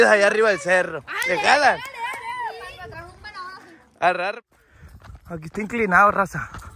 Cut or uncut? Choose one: cut